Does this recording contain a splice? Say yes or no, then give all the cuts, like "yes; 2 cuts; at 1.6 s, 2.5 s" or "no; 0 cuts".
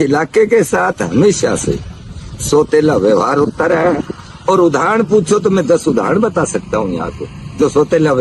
no; 0 cuts